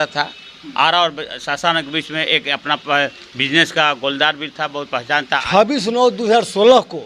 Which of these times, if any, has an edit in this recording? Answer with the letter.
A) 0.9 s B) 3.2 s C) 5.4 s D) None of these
C